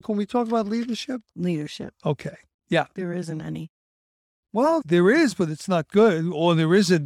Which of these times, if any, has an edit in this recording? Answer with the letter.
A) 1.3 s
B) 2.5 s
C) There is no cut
A